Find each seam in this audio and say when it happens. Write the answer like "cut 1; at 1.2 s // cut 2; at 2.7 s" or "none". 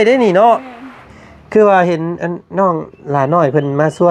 cut 1; at 1.1 s